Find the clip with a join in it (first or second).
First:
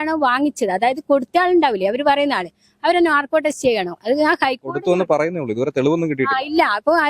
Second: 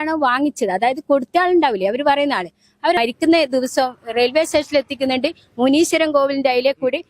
second